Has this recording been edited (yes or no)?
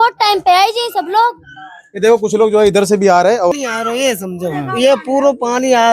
yes